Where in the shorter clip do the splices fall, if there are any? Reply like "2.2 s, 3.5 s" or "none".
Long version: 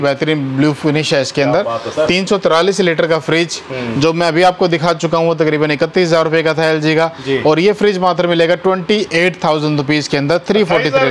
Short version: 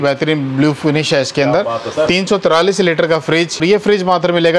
3.6 s